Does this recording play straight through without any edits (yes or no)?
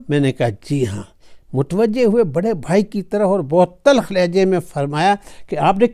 yes